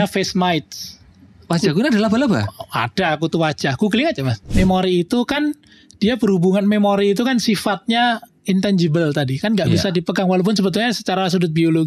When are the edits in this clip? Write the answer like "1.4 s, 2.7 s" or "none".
4.4 s